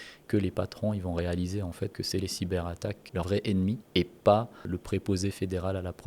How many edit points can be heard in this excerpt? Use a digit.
4